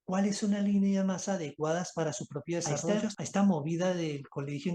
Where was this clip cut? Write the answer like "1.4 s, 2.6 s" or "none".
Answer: 2.7 s